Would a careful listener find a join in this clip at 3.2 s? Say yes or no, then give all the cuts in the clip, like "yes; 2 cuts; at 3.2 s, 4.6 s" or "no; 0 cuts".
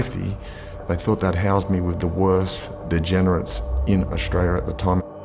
no; 1 cut; at 1.9 s